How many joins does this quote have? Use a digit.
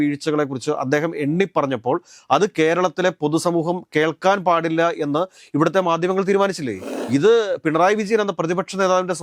1